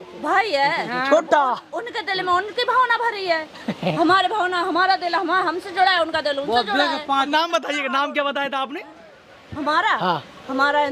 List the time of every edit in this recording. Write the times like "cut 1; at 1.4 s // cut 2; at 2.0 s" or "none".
cut 1; at 7.3 s